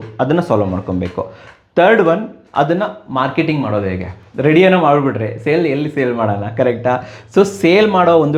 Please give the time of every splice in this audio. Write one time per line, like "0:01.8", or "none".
none